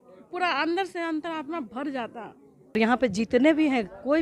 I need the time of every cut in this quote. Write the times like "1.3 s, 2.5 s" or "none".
2.8 s